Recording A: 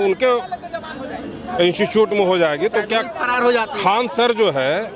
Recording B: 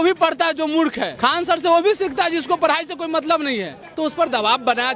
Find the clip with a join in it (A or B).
B